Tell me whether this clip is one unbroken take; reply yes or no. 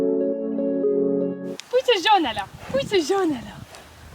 no